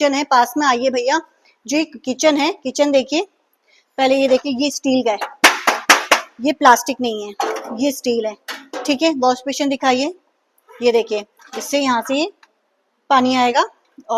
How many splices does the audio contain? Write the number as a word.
zero